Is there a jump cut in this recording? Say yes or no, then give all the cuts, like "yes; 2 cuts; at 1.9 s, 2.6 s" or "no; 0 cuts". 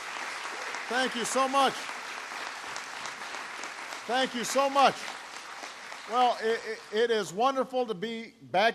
yes; 1 cut; at 7.1 s